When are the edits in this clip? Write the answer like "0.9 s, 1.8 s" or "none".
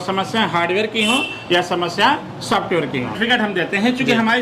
3.2 s